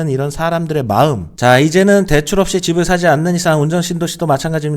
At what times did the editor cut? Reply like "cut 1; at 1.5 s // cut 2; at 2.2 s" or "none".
cut 1; at 1.3 s